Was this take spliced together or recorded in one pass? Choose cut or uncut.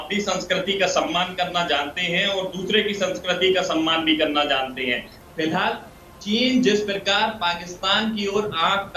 cut